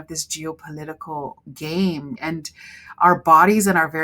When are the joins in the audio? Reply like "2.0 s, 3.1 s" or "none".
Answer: 2.2 s